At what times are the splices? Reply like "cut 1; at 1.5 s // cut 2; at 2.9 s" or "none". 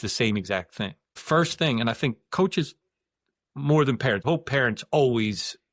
cut 1; at 1.1 s // cut 2; at 4.2 s

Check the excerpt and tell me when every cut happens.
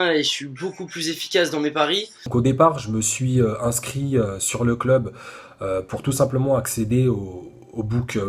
cut 1; at 2.3 s

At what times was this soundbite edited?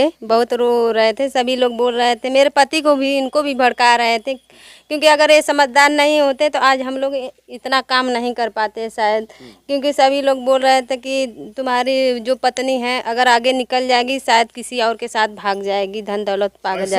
none

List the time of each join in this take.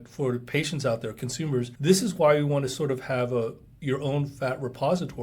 cut 1; at 1.7 s

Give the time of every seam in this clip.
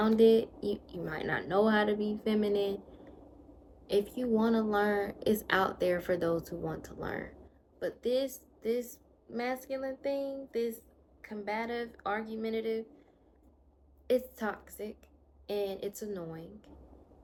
none

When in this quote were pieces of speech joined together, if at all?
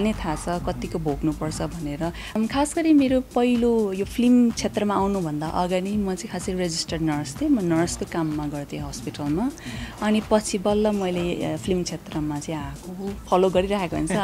cut 1; at 2.4 s // cut 2; at 13.2 s

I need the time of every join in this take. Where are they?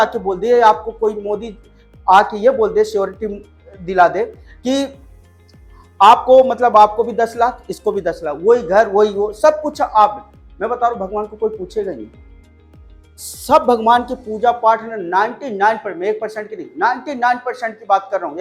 none

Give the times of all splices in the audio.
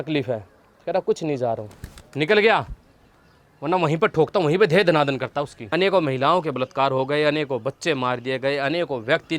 cut 1; at 5.6 s

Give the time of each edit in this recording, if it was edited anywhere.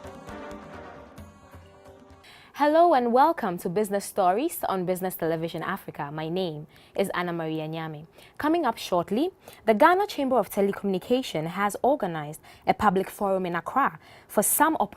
cut 1; at 2.1 s

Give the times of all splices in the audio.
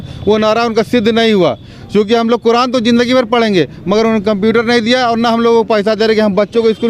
none

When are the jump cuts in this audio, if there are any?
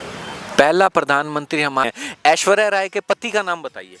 cut 1; at 1.9 s

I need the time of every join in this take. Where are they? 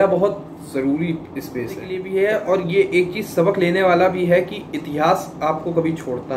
cut 1; at 2.0 s

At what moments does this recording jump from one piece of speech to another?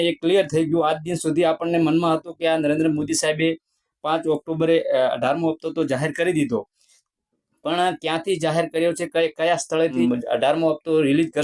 cut 1; at 10.0 s

